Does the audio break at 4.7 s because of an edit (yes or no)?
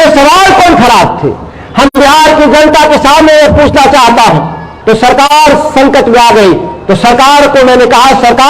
yes